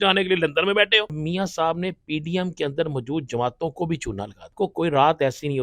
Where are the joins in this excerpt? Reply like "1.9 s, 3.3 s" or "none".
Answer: 1.2 s, 4.5 s